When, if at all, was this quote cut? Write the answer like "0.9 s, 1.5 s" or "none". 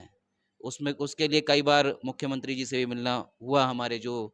none

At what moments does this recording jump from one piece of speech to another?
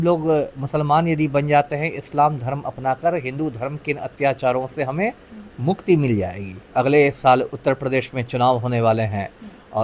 6.6 s

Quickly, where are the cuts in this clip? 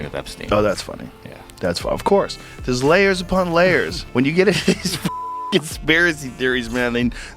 4.0 s

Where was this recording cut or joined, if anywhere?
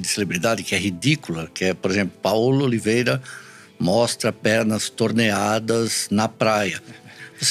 none

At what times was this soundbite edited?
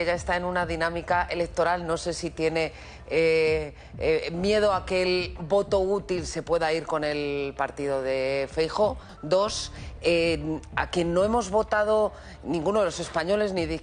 9.1 s

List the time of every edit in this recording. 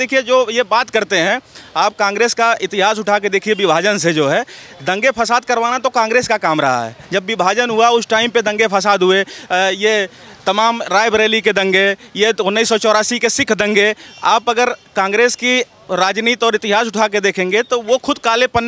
none

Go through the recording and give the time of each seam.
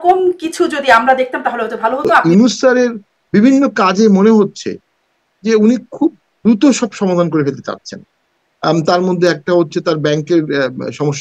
2.2 s

